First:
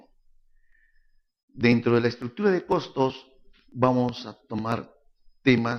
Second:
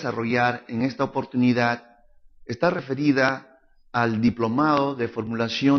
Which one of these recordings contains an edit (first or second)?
second